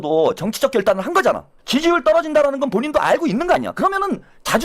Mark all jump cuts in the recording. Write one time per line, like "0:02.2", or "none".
0:01.5